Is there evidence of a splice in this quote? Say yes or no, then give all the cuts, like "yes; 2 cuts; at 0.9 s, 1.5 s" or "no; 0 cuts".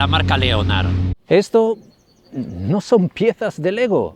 yes; 1 cut; at 1.1 s